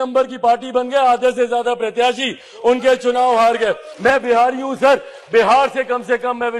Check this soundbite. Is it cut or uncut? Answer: cut